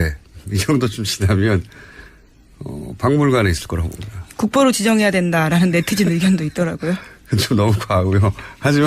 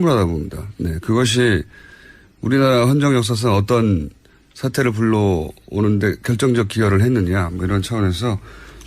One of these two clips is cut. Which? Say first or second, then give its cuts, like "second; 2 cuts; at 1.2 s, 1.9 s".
second; 1 cut; at 4.0 s